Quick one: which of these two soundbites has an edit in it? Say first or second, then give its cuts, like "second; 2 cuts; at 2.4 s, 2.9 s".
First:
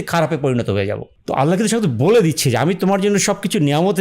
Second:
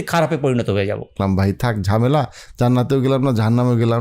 second; 1 cut; at 1.1 s